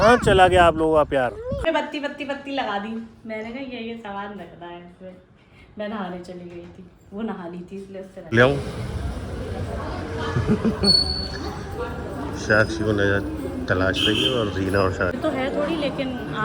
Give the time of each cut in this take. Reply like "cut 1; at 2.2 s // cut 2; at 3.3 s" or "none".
cut 1; at 1.6 s // cut 2; at 8.3 s // cut 3; at 15.2 s